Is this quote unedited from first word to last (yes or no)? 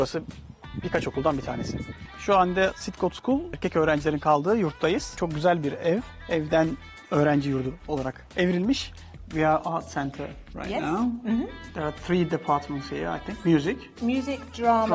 no